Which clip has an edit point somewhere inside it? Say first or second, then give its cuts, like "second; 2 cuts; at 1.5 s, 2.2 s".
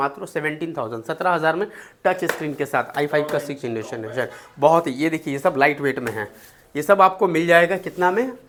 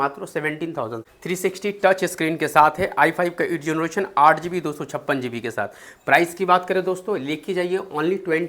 second; 1 cut; at 1.0 s